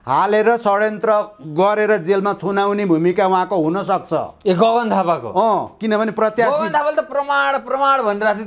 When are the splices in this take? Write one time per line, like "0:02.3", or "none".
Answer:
none